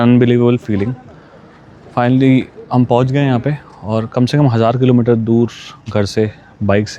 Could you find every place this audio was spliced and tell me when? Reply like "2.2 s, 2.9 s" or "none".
none